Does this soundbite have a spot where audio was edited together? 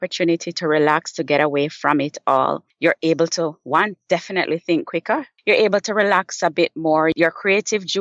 yes; 3 cuts; at 2.7 s, 5.3 s, 7.1 s

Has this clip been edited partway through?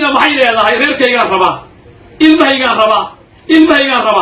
no; 0 cuts

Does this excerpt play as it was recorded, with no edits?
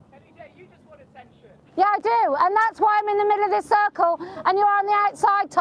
yes; 0 cuts

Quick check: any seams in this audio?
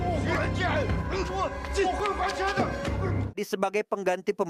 no; 0 cuts

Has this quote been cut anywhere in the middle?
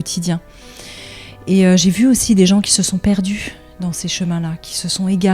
no; 0 cuts

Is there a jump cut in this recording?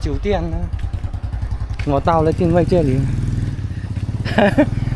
no; 0 cuts

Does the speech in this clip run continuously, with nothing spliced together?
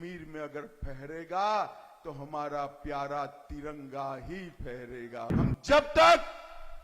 no; 1 cut; at 5.3 s

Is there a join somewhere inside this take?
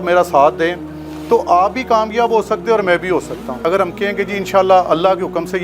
yes; 1 cut; at 3.5 s

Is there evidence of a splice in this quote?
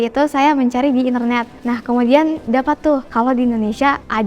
yes; 1 cut; at 1.6 s

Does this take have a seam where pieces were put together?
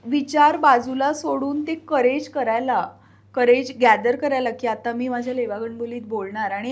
no; 0 cuts

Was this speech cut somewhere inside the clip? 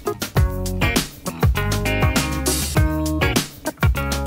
no; 0 cuts

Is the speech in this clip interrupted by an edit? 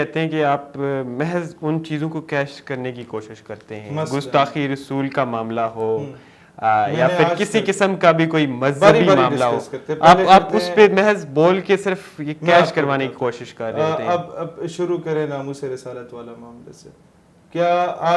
no; 0 cuts

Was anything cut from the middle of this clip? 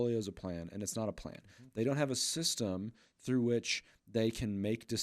no; 0 cuts

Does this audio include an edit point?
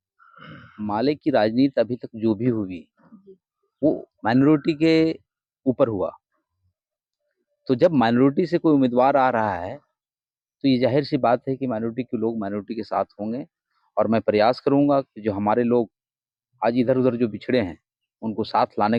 no; 0 cuts

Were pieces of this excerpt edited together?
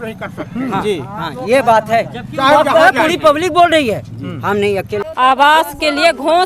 yes; 1 cut; at 5.0 s

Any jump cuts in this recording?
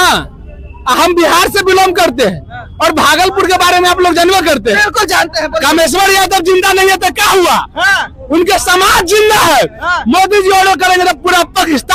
no; 0 cuts

